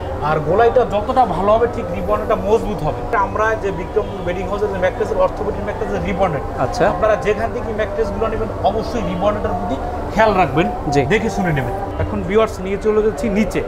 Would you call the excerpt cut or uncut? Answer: uncut